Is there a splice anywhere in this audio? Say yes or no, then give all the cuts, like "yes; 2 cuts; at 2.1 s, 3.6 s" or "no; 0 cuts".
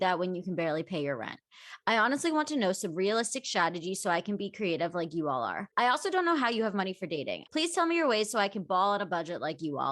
yes; 2 cuts; at 5.6 s, 7.4 s